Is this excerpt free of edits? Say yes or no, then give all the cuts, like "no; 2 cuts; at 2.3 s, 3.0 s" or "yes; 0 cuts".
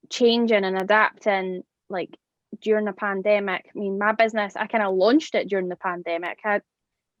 yes; 0 cuts